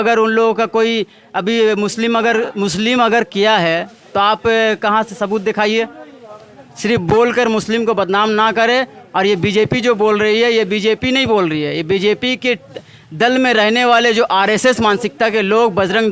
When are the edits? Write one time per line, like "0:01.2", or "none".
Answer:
none